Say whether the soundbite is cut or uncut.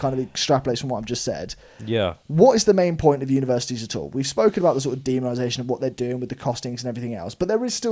uncut